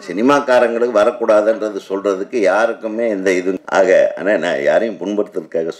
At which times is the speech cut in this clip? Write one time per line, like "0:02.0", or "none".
0:03.6